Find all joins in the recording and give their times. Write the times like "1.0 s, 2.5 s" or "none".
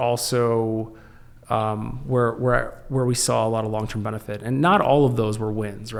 none